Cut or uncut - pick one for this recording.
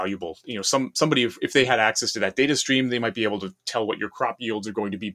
uncut